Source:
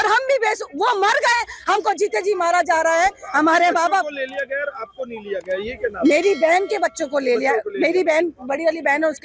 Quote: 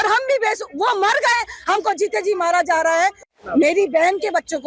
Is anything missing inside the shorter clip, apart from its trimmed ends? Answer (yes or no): yes